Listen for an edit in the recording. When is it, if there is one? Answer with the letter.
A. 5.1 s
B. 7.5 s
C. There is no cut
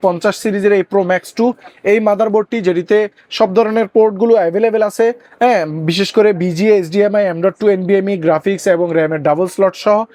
C